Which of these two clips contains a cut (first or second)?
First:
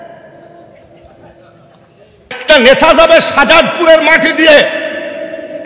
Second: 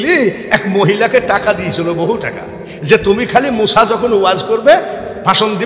first